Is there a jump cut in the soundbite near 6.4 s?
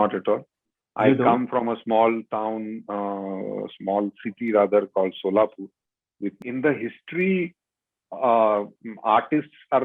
yes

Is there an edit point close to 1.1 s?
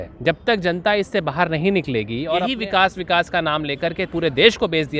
no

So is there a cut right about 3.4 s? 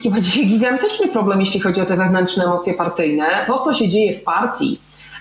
yes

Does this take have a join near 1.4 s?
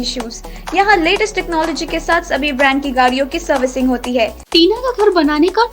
no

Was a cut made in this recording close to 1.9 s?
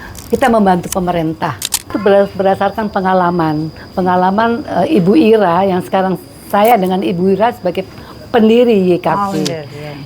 yes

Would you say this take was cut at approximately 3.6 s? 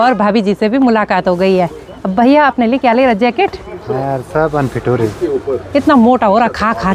no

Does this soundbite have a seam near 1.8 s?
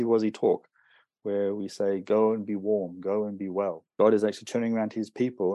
no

